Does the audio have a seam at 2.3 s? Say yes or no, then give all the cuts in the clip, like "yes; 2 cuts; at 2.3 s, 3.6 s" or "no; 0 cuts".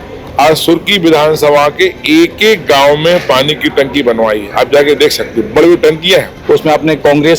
no; 1 cut; at 6.3 s